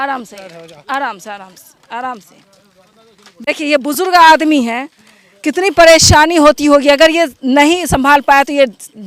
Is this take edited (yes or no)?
no